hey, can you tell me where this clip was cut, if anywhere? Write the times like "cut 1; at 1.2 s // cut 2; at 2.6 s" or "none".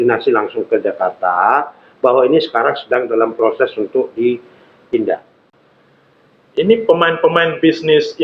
cut 1; at 5.5 s